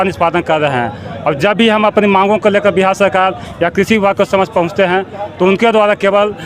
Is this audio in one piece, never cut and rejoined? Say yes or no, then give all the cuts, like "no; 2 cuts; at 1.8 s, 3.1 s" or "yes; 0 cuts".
yes; 0 cuts